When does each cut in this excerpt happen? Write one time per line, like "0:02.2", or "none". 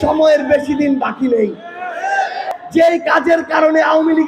0:02.5